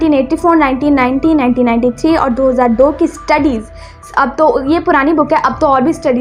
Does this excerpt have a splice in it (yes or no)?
no